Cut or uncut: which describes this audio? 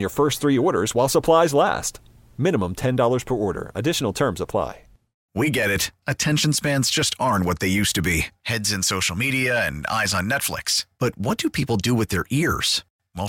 cut